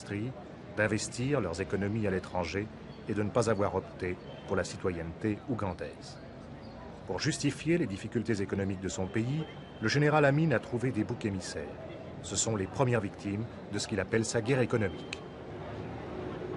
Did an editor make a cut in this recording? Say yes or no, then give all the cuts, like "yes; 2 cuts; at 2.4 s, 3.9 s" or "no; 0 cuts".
no; 0 cuts